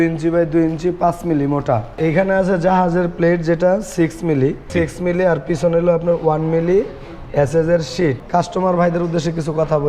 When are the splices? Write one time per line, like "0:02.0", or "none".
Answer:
0:02.0
0:04.7
0:08.2